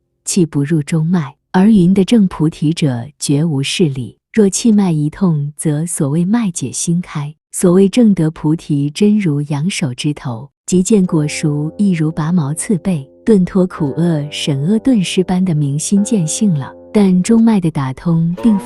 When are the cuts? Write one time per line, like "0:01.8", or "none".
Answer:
0:16.8